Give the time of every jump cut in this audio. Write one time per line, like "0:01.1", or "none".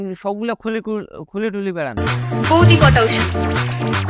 0:01.9